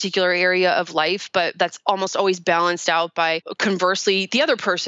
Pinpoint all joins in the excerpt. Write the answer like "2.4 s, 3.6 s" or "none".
3.5 s